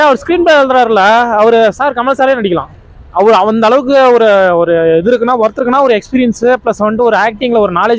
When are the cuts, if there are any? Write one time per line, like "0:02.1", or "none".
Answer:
none